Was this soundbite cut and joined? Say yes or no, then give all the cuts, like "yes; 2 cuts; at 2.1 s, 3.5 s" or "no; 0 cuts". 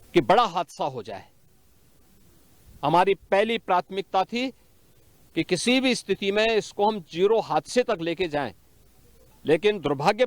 no; 0 cuts